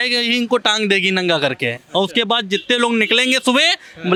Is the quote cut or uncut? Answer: uncut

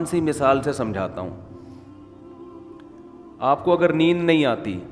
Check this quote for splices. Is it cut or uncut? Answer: cut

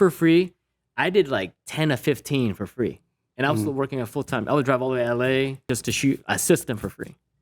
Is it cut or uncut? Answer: cut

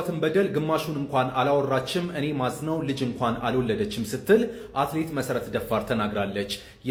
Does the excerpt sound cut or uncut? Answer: uncut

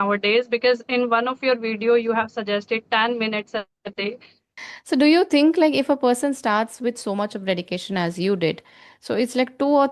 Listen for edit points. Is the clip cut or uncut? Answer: cut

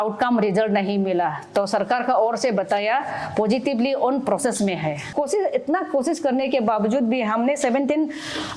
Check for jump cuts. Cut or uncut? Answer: cut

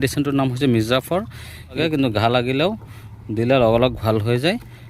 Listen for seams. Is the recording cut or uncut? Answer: cut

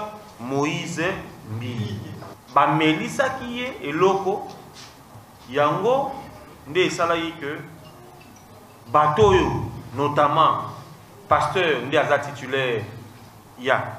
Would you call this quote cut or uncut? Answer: cut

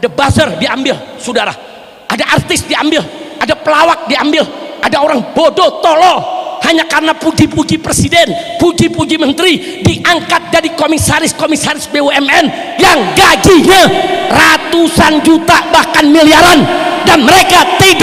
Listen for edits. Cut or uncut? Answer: uncut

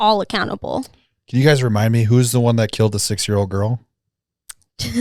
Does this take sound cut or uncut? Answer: uncut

